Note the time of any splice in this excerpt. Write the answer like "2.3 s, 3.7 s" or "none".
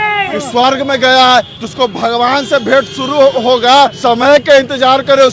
1.5 s, 4.0 s